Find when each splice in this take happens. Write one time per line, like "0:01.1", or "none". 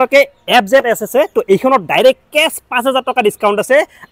none